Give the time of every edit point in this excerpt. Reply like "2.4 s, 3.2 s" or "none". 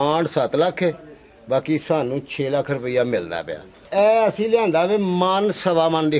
3.8 s